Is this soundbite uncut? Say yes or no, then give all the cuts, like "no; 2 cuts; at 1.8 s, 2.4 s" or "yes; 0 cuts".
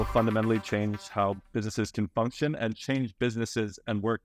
yes; 0 cuts